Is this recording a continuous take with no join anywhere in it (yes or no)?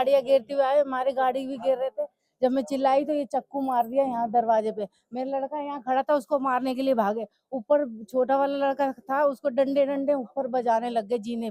yes